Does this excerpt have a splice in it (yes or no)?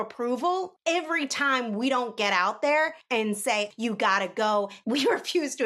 yes